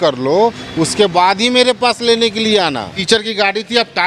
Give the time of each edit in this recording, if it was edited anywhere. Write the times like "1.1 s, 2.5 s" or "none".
2.9 s

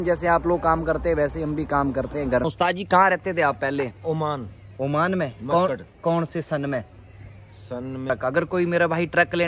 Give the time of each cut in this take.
2.4 s, 8.1 s

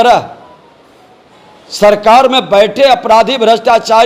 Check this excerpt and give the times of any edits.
none

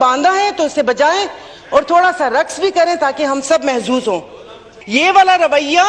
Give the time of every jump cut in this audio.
4.7 s

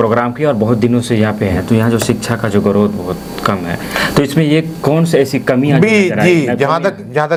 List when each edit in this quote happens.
none

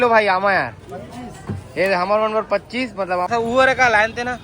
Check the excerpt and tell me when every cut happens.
3.3 s

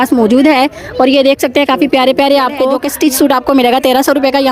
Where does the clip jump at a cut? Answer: 2.8 s

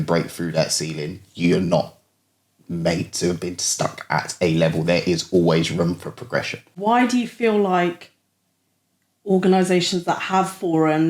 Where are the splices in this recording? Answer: 6.6 s

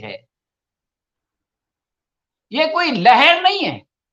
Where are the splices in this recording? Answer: none

